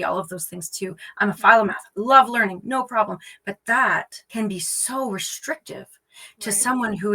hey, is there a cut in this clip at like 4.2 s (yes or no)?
yes